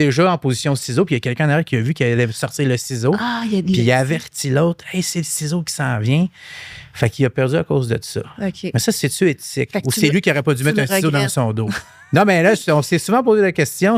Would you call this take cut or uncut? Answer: uncut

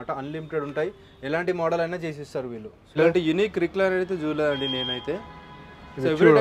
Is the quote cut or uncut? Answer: cut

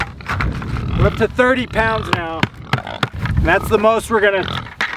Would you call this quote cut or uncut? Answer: cut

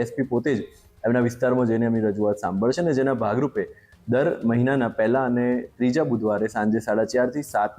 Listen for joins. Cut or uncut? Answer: uncut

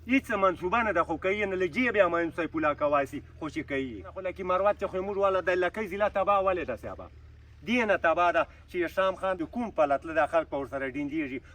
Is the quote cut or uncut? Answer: cut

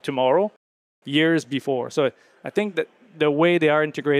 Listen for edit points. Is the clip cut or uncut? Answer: uncut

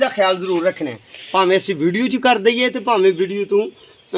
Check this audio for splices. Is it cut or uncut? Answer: uncut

